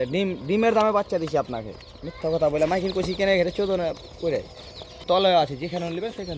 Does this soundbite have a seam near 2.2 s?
no; 1 cut; at 5.0 s

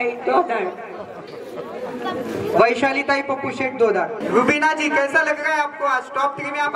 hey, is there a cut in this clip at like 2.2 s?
no; 1 cut; at 4.2 s

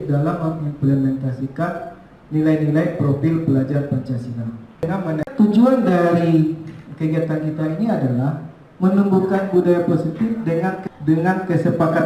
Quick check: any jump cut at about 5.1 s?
yes; 2 cuts; at 5.1 s, 10.8 s

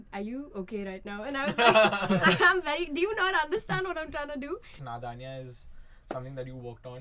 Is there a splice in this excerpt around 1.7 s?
no; 1 cut; at 4.7 s

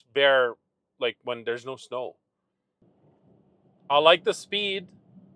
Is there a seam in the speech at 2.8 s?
yes; 1 cut; at 2.8 s

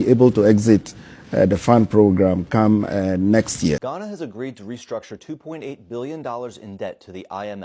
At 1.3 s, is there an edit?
no; 1 cut; at 3.9 s

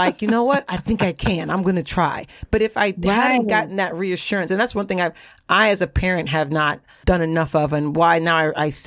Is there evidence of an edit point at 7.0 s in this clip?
yes; 1 cut; at 7.0 s

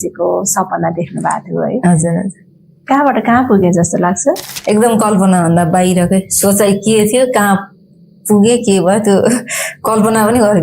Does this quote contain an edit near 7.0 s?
no; 1 cut; at 4.5 s

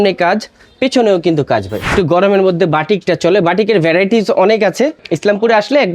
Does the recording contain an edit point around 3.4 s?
no; 2 cuts; at 1.9 s, 5.0 s

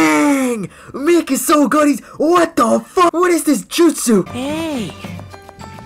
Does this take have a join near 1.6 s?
no; 2 cuts; at 3.1 s, 4.3 s

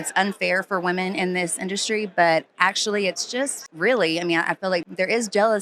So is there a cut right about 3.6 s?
yes; 2 cuts; at 3.6 s, 4.8 s

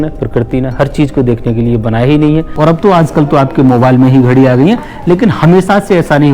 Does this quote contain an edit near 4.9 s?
no; 1 cut; at 2.5 s

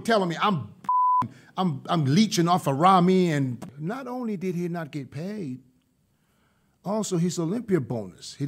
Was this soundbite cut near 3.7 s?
yes; 1 cut; at 3.7 s

